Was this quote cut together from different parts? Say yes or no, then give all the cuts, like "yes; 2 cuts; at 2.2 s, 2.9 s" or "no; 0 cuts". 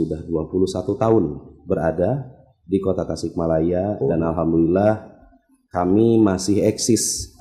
no; 0 cuts